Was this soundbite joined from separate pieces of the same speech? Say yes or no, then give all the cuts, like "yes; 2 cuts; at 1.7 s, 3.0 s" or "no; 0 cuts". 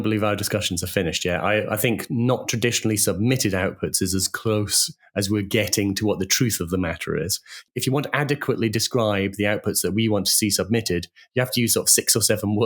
yes; 1 cut; at 7.6 s